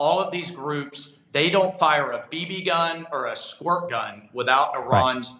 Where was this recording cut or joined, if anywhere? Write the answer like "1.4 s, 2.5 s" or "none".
none